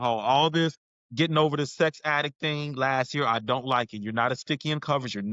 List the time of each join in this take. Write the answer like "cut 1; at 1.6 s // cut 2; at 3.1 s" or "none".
none